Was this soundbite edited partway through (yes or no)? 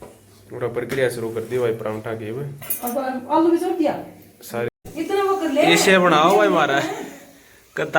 yes